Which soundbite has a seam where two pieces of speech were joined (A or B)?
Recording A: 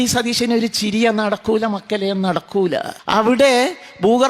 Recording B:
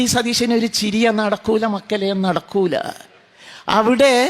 A